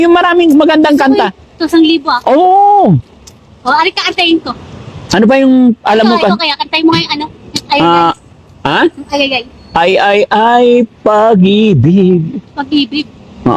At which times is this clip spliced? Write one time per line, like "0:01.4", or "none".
none